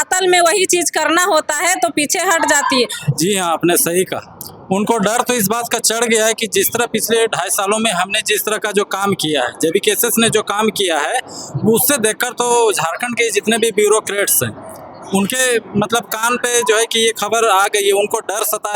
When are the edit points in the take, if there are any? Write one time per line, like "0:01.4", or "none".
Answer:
0:03.0